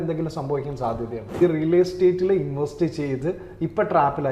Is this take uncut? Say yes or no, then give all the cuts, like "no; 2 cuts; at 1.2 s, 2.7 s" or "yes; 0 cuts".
no; 1 cut; at 1.4 s